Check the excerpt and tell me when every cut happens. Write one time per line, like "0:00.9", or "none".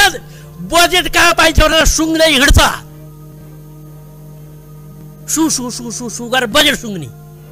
none